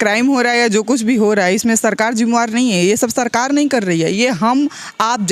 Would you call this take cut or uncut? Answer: uncut